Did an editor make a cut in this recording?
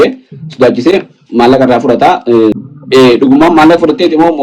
yes; 1 cut; at 2.6 s

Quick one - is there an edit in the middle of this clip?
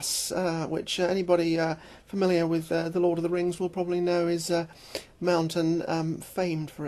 no; 0 cuts

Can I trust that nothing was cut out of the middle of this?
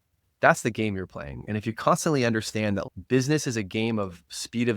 no; 1 cut; at 2.9 s

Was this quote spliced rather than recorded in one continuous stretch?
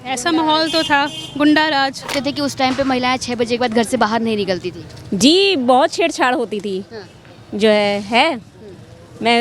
yes; 1 cut; at 2.1 s

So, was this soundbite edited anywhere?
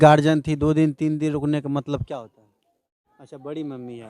yes; 1 cut; at 3.0 s

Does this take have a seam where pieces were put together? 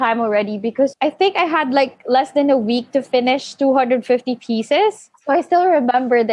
yes; 2 cuts; at 0.9 s, 5.1 s

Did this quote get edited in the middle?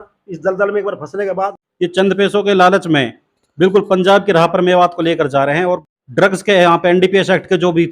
yes; 2 cuts; at 1.5 s, 5.8 s

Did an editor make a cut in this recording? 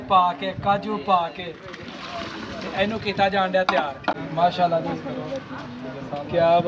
no; 0 cuts

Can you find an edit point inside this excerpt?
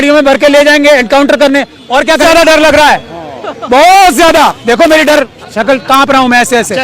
yes; 1 cut; at 2.2 s

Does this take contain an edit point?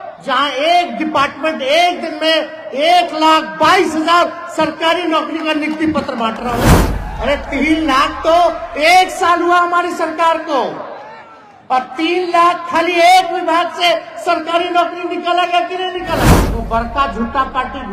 yes; 2 cuts; at 6.8 s, 16.4 s

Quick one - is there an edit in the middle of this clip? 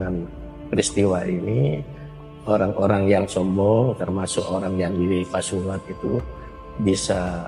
no; 0 cuts

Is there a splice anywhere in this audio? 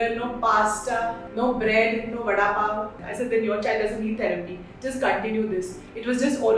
yes; 2 cuts; at 1.2 s, 3.0 s

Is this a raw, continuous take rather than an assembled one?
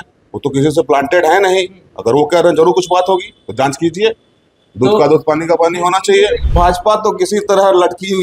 no; 1 cut; at 6.4 s

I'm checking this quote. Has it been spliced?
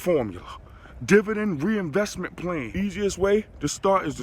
yes; 1 cut; at 2.7 s

